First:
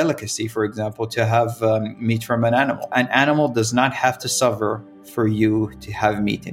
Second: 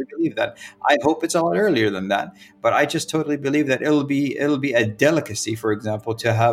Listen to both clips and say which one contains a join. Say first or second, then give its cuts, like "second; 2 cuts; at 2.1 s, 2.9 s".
first; 1 cut; at 2.9 s